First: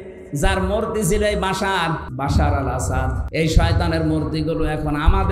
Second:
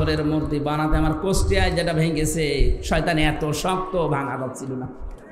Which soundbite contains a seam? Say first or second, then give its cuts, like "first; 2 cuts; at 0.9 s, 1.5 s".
first; 2 cuts; at 2.1 s, 3.2 s